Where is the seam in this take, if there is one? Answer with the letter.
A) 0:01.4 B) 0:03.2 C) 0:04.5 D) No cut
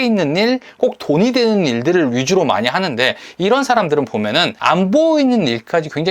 C